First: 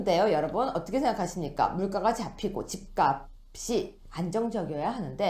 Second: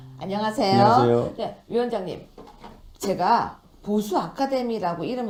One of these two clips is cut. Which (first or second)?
first